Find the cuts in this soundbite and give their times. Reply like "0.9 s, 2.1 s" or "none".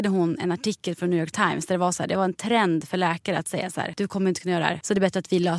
3.9 s, 4.8 s